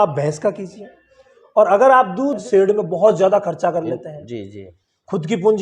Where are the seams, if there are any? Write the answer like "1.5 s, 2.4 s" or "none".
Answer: 2.4 s